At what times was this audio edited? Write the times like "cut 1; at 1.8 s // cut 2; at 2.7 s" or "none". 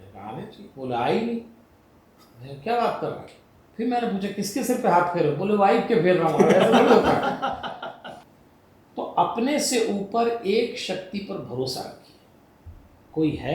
cut 1; at 8.2 s

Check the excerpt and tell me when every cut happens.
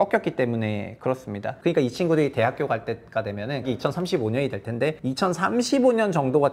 cut 1; at 1.4 s // cut 2; at 3.6 s // cut 3; at 5.0 s

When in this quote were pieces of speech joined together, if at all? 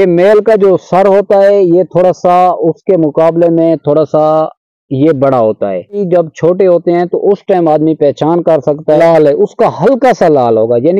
cut 1; at 6.0 s // cut 2; at 9.0 s

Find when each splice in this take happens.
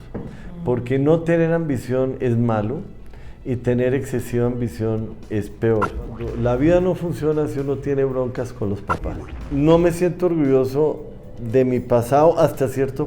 cut 1; at 6.3 s // cut 2; at 9.4 s

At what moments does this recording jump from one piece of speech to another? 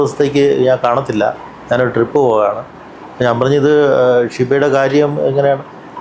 none

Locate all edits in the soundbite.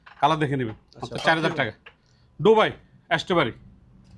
none

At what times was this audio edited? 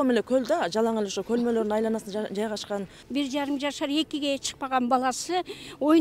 cut 1; at 3.0 s

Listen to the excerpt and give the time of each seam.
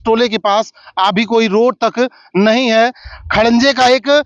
none

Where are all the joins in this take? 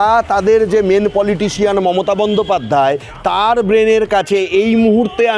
none

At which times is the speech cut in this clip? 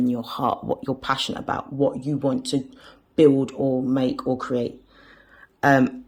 none

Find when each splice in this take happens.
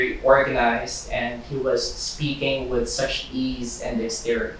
none

